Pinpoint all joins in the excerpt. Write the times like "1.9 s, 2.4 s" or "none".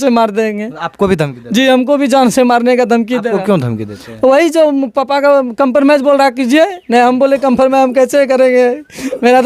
none

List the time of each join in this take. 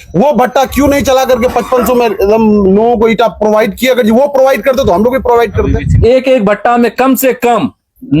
5.9 s

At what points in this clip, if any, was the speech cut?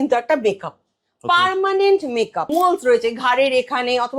2.5 s

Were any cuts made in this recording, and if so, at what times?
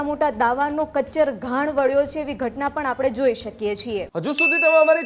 4.1 s

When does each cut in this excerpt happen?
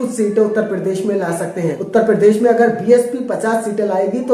1.5 s

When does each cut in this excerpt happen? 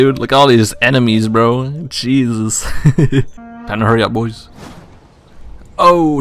3.4 s

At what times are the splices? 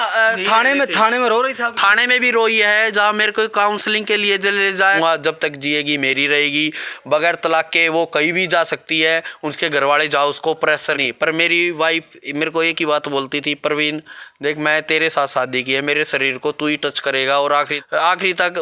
5.0 s, 11.0 s, 17.7 s

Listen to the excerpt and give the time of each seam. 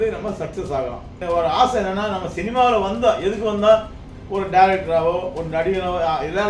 1.2 s

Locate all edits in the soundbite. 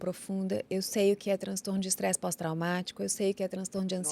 none

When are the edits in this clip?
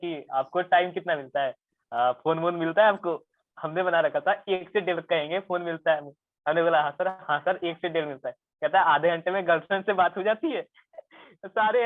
none

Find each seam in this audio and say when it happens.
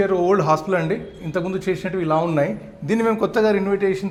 none

